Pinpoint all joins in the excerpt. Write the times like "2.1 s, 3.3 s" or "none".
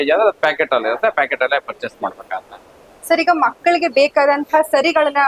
none

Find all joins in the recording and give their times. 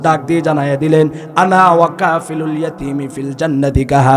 none

